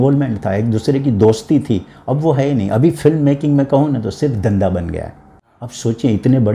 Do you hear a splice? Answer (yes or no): yes